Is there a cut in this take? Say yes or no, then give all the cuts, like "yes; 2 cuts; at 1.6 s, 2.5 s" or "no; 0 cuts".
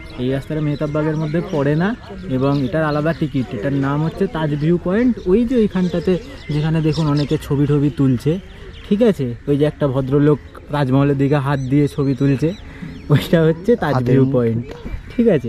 no; 0 cuts